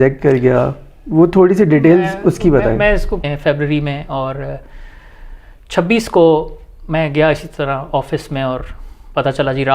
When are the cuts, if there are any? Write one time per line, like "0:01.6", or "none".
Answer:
0:03.2